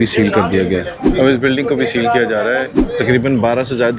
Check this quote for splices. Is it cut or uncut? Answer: cut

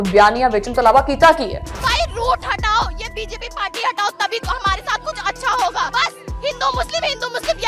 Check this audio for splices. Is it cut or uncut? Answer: uncut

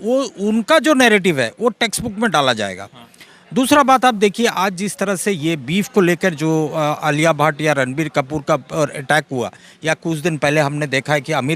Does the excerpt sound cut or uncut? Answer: uncut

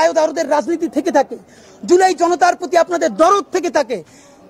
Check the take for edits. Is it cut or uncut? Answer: uncut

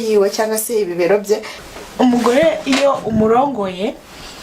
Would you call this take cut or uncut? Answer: cut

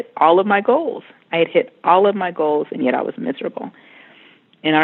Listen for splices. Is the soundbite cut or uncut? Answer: uncut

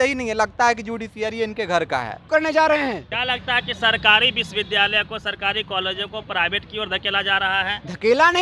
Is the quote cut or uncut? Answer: cut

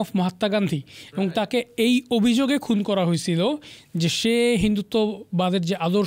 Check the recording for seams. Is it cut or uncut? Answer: uncut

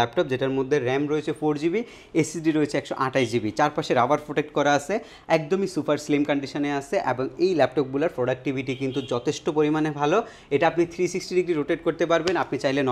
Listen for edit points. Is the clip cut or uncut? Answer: uncut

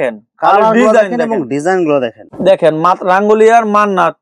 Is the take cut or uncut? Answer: cut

